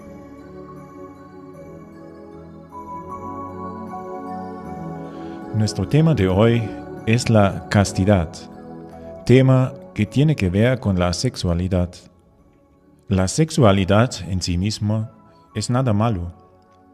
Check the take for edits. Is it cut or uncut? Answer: uncut